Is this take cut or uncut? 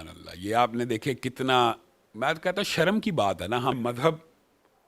cut